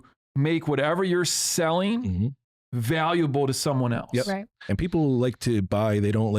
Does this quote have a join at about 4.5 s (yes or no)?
yes